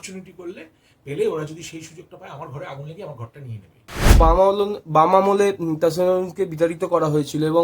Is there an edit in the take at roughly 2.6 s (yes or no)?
no